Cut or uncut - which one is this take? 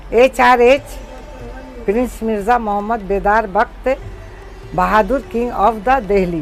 uncut